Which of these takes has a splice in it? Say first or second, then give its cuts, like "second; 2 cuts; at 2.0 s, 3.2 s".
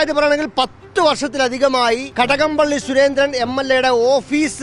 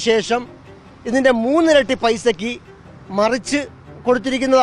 first; 1 cut; at 2.1 s